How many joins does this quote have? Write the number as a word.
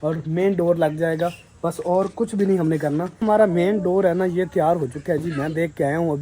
one